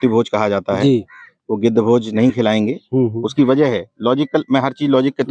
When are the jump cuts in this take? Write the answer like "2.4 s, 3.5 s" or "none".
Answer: none